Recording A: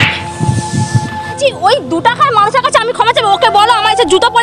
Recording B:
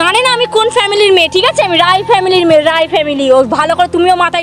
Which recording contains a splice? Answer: A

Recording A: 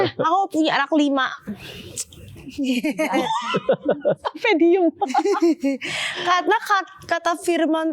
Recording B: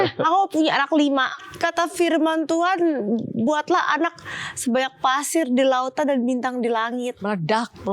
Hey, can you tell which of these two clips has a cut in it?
B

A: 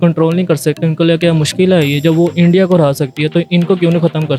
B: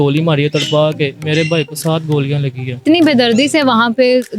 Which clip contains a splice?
B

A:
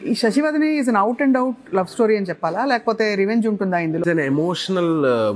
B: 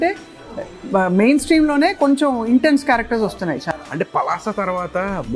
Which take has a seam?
A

